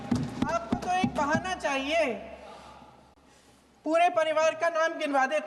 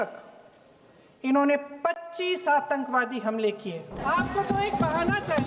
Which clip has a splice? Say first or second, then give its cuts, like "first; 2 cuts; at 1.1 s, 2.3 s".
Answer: second; 1 cut; at 4.0 s